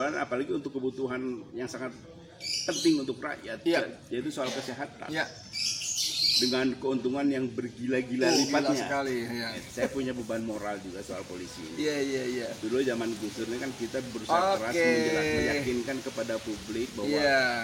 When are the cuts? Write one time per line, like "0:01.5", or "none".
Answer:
0:09.6